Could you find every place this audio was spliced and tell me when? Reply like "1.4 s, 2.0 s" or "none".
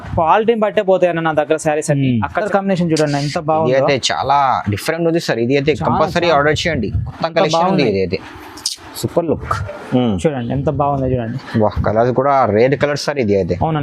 2.5 s